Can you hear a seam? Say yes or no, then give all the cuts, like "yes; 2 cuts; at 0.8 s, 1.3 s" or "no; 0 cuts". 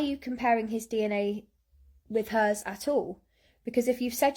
no; 0 cuts